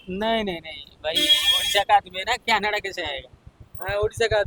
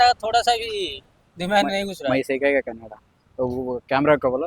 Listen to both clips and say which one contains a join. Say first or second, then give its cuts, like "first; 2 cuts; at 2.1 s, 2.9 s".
second; 1 cut; at 2.8 s